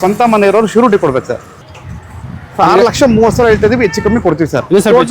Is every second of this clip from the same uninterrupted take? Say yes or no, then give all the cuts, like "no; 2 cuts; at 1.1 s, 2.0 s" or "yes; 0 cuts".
no; 1 cut; at 1.5 s